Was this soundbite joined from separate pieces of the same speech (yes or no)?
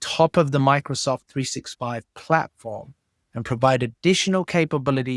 no